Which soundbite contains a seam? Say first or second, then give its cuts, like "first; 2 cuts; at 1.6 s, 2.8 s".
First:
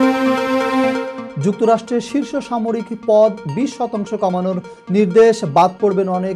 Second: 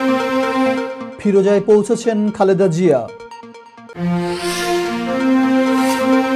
first; 1 cut; at 1.2 s